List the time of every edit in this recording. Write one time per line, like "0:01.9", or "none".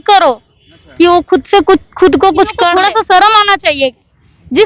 0:02.7